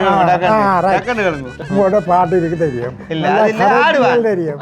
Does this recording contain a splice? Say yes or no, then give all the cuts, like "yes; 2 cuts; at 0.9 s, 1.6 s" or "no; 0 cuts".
yes; 1 cut; at 1.6 s